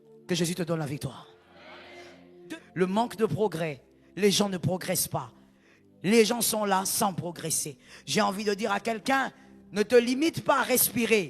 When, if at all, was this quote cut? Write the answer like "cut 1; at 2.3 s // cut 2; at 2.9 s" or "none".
cut 1; at 2.1 s